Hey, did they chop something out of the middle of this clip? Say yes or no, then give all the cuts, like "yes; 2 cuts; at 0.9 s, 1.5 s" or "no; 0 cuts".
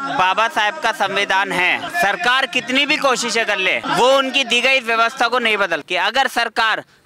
yes; 3 cuts; at 1.9 s, 3.8 s, 5.8 s